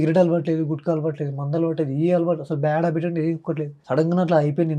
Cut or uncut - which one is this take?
cut